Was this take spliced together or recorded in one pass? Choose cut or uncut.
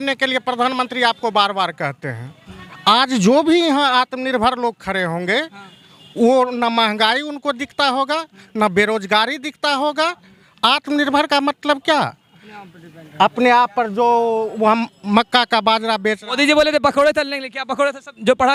uncut